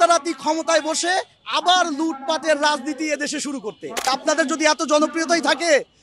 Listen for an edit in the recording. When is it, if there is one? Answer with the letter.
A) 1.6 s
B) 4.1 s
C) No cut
B